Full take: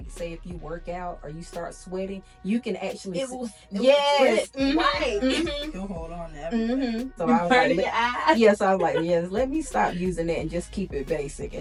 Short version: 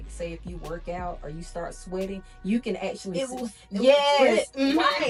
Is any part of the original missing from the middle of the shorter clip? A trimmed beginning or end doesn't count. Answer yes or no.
no